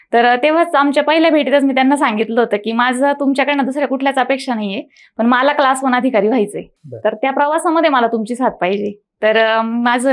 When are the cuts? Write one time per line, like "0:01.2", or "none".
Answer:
none